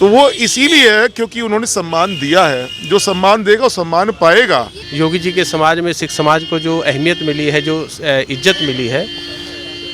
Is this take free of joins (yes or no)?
no